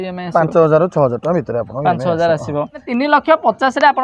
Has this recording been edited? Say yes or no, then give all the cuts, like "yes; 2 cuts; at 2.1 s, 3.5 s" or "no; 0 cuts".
yes; 1 cut; at 2.8 s